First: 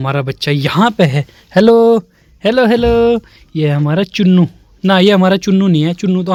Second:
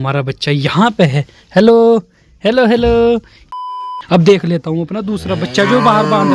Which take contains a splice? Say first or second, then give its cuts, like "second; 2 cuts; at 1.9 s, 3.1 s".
second; 1 cut; at 3.8 s